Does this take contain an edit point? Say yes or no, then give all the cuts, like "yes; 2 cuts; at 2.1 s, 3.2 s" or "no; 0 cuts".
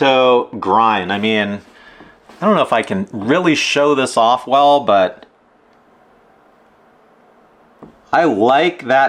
no; 0 cuts